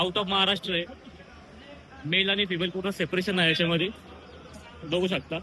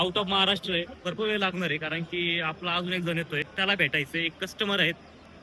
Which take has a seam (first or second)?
second